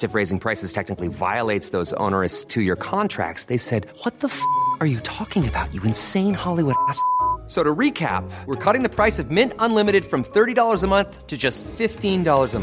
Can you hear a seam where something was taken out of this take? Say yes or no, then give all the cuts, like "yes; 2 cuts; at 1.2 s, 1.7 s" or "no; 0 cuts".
no; 0 cuts